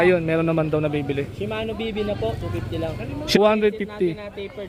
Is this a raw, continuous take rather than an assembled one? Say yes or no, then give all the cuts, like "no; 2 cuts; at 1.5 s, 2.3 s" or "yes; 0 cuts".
yes; 0 cuts